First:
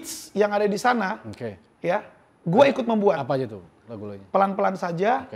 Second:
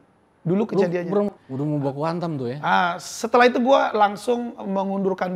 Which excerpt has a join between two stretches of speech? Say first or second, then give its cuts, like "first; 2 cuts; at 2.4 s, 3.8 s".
second; 1 cut; at 1.3 s